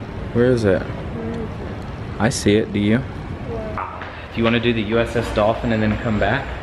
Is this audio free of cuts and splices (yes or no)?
no